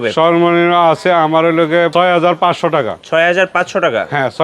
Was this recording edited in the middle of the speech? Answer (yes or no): yes